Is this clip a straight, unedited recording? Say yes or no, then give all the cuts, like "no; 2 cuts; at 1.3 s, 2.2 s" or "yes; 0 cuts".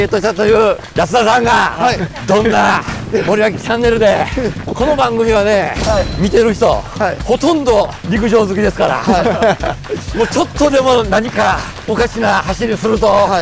no; 8 cuts; at 0.8 s, 2.1 s, 3.0 s, 4.6 s, 6.1 s, 7.2 s, 8.0 s, 11.7 s